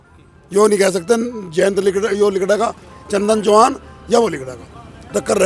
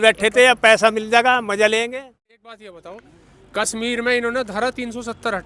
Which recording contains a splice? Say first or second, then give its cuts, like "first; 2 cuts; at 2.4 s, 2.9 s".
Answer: second; 1 cut; at 1.9 s